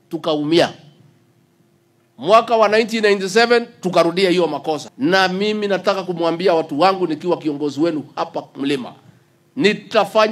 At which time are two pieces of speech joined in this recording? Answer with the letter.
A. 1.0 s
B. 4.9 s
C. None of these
B